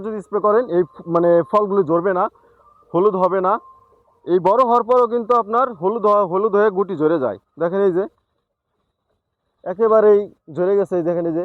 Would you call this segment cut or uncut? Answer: uncut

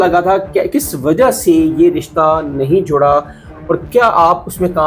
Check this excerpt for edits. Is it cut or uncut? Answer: uncut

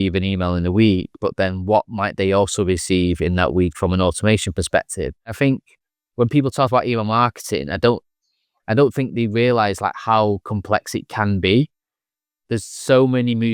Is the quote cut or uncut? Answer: cut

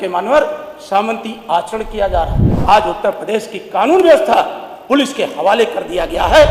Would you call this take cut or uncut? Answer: cut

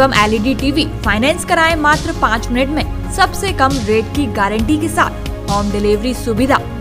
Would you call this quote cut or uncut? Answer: uncut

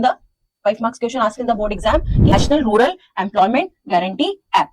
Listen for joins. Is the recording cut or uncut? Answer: cut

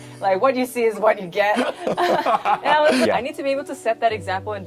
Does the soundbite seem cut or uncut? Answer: cut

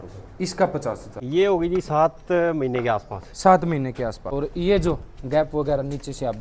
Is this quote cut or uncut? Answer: cut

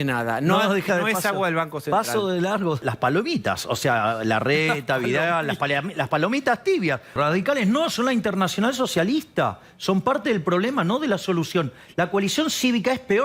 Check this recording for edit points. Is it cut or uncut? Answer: cut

